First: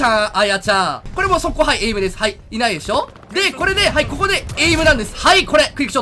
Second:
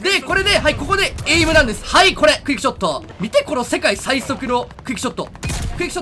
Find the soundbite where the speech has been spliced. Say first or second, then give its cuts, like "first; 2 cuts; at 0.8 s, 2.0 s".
first; 1 cut; at 1.0 s